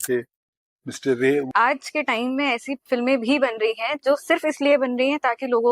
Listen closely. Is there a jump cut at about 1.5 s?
yes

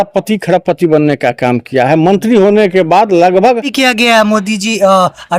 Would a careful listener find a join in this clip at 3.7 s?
yes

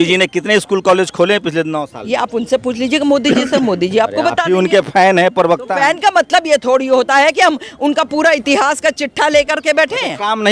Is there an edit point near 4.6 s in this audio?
no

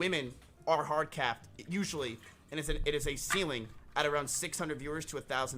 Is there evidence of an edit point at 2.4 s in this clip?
no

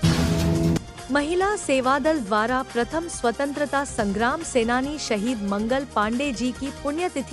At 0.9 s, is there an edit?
yes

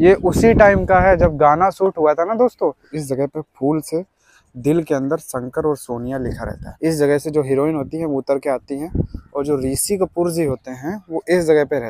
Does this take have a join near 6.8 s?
yes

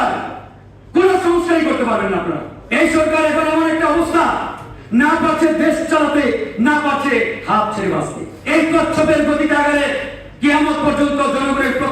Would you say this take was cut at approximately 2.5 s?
yes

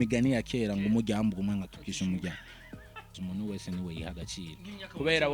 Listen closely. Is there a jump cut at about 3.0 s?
yes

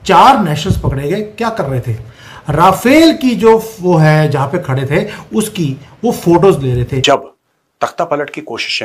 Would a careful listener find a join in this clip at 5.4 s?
no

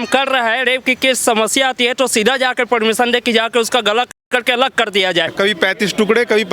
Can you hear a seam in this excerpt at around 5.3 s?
yes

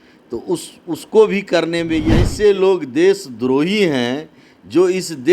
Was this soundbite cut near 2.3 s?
yes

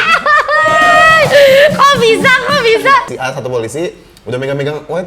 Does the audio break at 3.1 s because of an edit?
yes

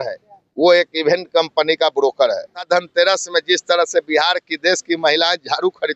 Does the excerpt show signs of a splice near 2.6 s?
yes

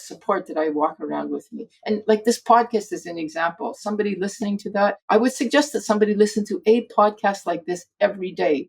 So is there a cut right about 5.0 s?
yes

